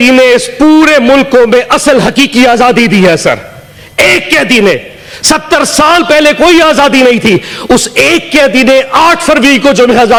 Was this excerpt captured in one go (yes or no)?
yes